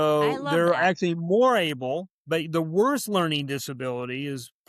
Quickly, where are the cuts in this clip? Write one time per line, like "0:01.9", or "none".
none